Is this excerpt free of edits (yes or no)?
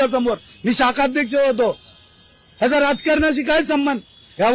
yes